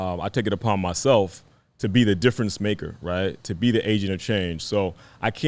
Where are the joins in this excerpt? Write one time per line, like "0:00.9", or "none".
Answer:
none